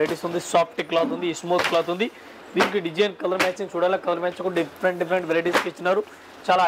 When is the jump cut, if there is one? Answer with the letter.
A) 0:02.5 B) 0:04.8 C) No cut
C